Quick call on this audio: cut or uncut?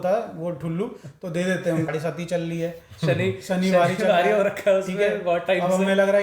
cut